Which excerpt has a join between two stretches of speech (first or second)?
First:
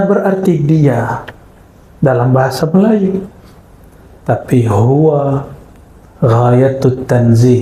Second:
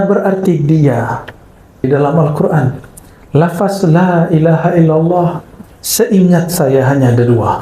second